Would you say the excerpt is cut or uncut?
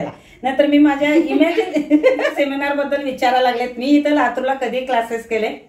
cut